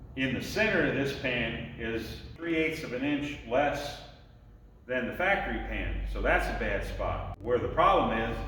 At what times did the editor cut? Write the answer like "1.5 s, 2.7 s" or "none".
2.4 s, 7.3 s